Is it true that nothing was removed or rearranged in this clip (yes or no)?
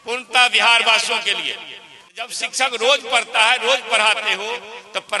no